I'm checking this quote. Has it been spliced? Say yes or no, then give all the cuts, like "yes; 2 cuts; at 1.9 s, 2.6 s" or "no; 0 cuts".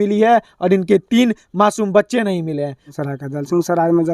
yes; 1 cut; at 2.9 s